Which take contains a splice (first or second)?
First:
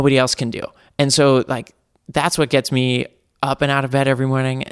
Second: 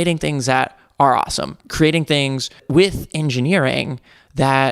second